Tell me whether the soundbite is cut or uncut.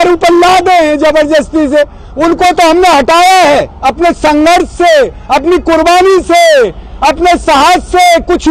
uncut